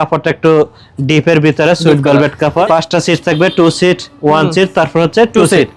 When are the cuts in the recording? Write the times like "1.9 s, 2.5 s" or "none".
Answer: none